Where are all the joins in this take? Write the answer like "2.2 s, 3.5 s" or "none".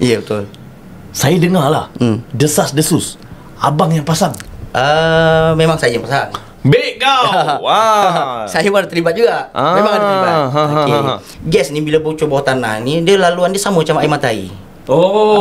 4.5 s, 11.3 s